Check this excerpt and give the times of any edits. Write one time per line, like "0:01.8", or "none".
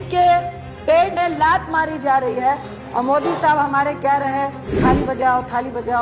0:01.1
0:02.7
0:04.6